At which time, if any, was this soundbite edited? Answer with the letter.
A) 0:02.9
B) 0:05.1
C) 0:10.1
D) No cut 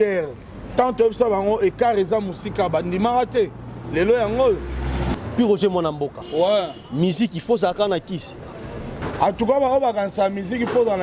B